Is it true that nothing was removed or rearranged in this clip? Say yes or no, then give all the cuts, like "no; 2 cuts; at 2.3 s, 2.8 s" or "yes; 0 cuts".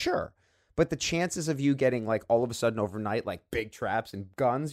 yes; 0 cuts